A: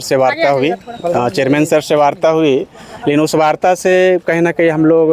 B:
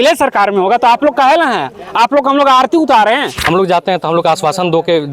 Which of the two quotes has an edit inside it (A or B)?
B